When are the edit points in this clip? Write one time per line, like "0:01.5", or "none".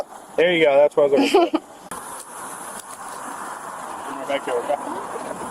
0:01.8